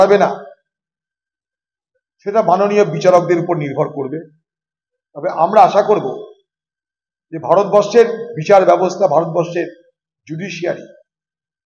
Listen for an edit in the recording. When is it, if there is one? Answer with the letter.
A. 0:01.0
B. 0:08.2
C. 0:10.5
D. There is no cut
D